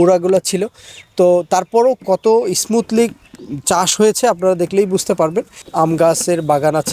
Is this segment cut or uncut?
cut